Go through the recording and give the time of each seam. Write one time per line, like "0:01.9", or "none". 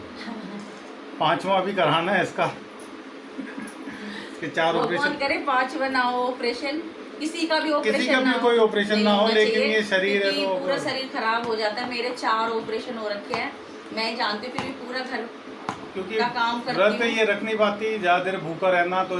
none